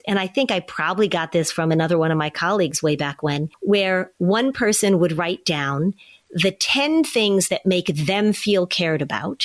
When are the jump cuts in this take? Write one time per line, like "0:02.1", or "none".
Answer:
none